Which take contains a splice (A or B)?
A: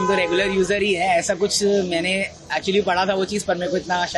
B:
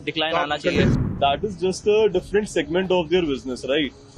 B